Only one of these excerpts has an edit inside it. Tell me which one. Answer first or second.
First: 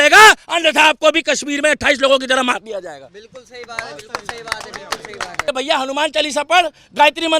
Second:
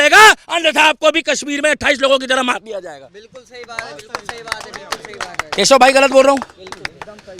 first